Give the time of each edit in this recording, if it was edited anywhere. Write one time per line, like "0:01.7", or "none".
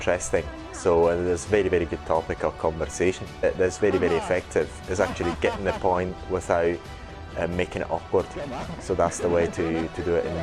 0:03.4